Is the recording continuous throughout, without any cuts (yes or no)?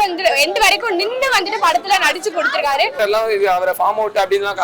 no